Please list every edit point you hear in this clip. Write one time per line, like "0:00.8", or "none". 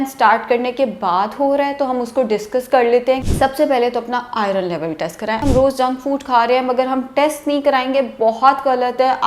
0:03.3
0:05.4